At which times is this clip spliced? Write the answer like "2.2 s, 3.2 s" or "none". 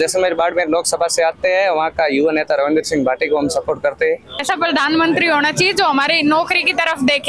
4.3 s